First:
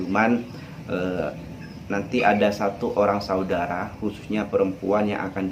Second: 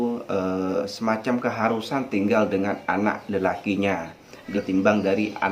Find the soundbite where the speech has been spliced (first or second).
second